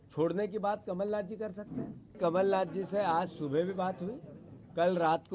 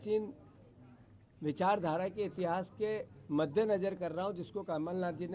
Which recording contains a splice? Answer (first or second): first